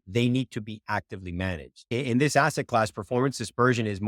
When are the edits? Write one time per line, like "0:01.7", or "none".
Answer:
0:01.9

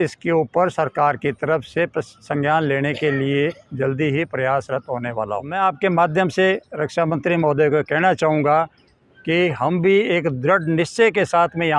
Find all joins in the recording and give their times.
0:05.5

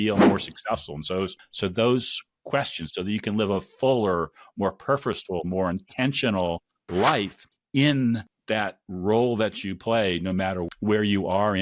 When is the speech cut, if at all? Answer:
0:10.6

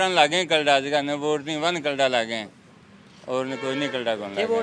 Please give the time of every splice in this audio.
none

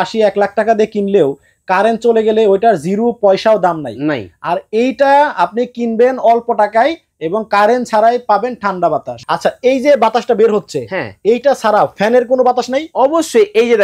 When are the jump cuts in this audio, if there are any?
0:09.1

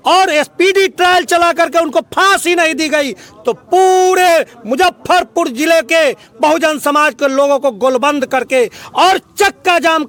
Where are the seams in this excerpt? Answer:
none

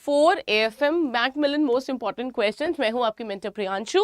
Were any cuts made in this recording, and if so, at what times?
0:01.4

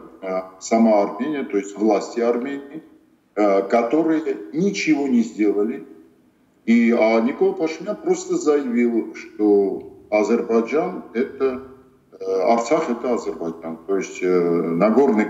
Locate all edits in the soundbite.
none

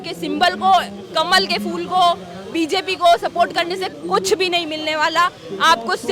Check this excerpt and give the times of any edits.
none

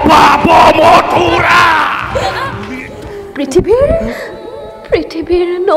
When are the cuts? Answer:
0:02.5

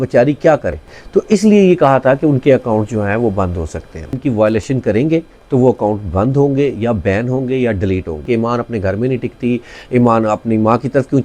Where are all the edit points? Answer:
0:00.9
0:04.2
0:08.2

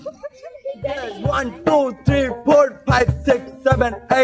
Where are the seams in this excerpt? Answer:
0:01.1

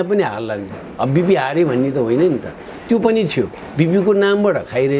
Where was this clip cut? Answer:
none

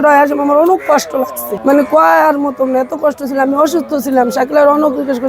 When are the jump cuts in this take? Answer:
0:01.4

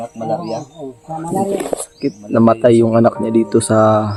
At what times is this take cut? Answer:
none

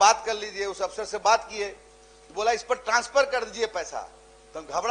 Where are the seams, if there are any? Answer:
none

